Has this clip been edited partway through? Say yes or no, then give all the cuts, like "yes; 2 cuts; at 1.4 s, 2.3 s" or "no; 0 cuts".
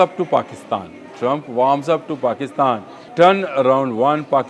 yes; 1 cut; at 3.0 s